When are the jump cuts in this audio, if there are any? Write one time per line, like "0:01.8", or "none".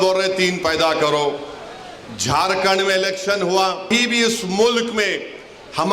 0:03.9